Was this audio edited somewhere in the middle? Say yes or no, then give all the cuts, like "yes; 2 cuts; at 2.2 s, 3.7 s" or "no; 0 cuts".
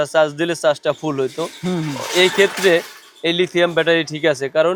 no; 0 cuts